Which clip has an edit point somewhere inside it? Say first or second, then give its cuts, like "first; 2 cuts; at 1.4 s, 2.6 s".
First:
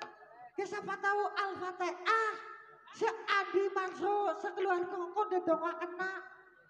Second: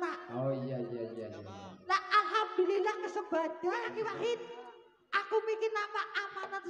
second; 1 cut; at 3.8 s